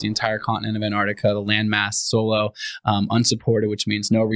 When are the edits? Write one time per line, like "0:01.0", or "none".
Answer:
none